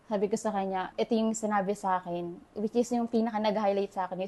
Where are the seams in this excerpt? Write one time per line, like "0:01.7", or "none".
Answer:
0:00.9